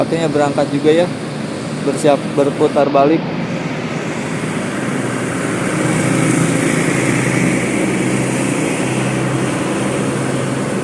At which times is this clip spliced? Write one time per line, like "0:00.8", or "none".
none